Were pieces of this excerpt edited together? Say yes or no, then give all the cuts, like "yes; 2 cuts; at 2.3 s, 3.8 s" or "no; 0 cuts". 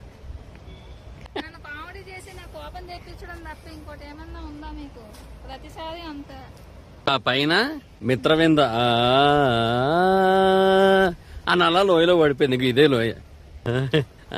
yes; 4 cuts; at 1.2 s, 7.0 s, 7.9 s, 13.6 s